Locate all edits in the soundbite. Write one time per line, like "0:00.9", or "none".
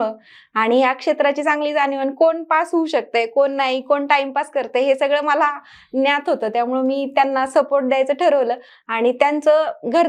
none

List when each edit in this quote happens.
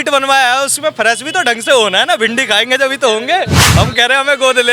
0:03.6

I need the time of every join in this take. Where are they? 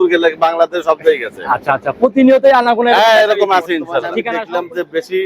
0:04.2

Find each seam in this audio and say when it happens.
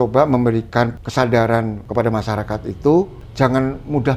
0:01.0
0:01.8
0:03.2

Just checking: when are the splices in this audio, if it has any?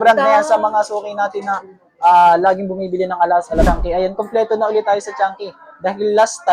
0:03.6

